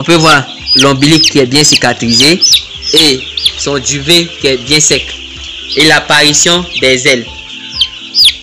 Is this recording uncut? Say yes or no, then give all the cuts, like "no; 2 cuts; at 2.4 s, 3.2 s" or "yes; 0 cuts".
yes; 0 cuts